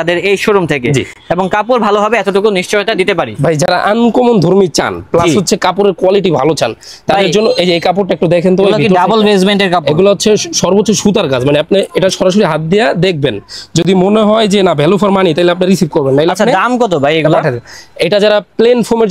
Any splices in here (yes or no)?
no